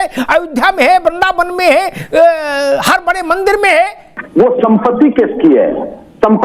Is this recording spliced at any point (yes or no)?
yes